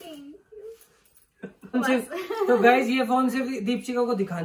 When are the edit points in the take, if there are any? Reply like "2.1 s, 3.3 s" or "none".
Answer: 1.8 s